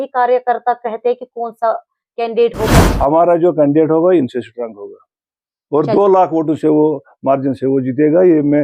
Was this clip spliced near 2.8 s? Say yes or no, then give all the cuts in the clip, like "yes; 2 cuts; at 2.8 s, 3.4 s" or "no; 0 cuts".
yes; 1 cut; at 2.8 s